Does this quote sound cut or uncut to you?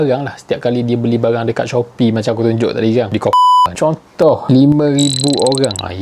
cut